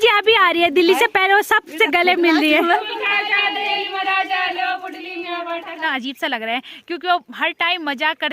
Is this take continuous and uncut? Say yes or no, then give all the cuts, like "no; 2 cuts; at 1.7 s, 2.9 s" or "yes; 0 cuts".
no; 2 cuts; at 2.8 s, 5.8 s